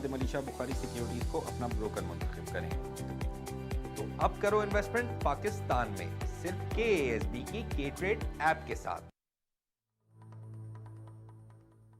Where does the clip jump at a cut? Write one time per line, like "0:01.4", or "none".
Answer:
0:09.8